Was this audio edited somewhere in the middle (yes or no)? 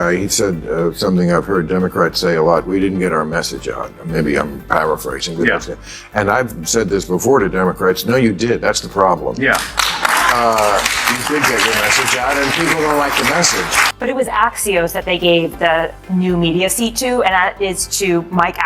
yes